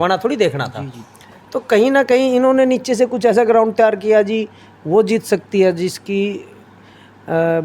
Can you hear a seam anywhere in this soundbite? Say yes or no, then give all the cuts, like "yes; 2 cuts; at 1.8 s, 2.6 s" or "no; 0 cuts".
no; 0 cuts